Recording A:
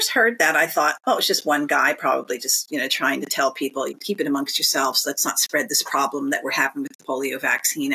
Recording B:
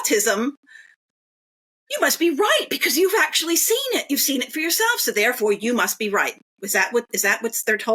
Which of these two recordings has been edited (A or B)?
A